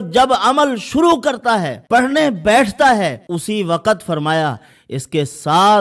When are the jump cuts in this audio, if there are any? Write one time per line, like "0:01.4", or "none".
0:01.8
0:03.3